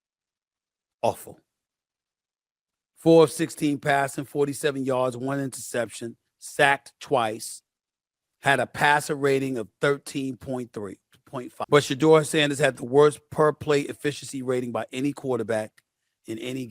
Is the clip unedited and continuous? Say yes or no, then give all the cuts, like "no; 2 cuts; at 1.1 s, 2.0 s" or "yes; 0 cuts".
no; 1 cut; at 11.6 s